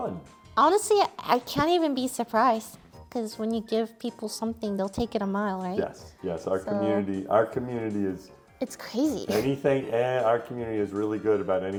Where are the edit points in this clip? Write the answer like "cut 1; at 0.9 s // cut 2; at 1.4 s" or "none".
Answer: none